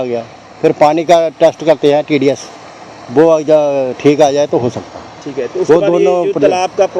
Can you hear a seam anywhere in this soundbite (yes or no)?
no